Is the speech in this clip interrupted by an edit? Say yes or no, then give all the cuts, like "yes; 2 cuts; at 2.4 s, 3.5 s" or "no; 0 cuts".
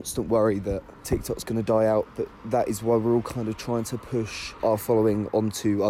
yes; 2 cuts; at 0.9 s, 4.4 s